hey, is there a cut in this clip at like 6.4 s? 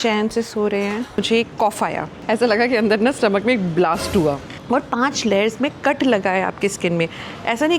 no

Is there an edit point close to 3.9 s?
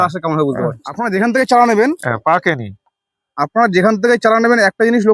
no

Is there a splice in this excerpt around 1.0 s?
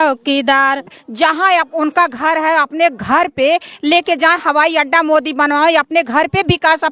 yes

